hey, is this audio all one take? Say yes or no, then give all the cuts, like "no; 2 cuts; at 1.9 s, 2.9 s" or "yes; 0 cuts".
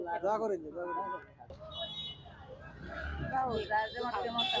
no; 1 cut; at 1.6 s